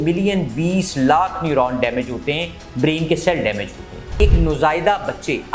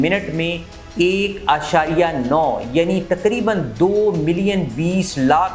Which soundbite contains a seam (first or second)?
first